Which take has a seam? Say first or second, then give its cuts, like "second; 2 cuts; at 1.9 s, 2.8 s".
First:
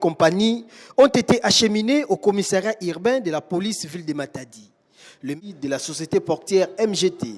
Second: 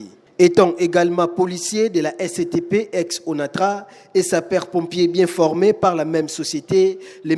first; 1 cut; at 5.4 s